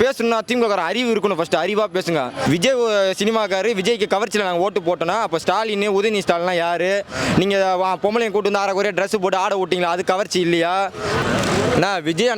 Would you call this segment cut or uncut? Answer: cut